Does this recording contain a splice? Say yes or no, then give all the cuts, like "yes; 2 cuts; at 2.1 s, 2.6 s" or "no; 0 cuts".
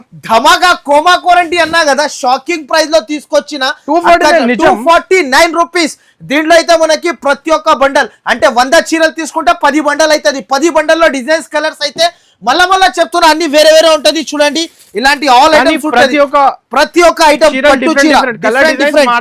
no; 0 cuts